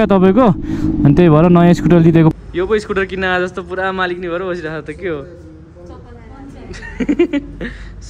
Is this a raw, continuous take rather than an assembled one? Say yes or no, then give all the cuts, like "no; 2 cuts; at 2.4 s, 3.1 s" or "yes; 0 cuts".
no; 1 cut; at 2.3 s